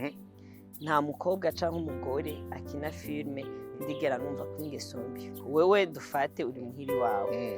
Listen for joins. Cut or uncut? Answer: cut